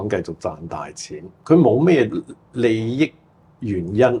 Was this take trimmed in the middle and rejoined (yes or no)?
yes